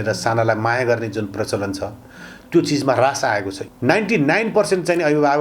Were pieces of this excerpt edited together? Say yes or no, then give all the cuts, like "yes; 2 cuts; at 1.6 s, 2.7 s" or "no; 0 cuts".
yes; 1 cut; at 3.6 s